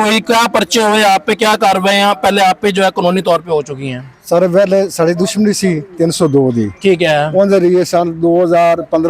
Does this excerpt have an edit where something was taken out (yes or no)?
no